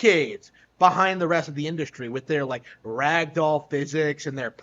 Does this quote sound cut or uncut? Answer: uncut